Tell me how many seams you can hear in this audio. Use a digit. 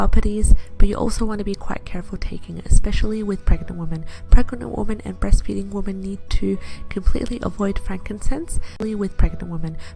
1